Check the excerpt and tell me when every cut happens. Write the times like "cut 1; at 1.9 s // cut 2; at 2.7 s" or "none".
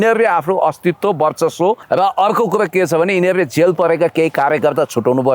cut 1; at 1.8 s